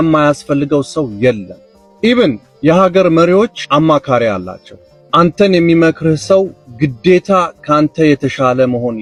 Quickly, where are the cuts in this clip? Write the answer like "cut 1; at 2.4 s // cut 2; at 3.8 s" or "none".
none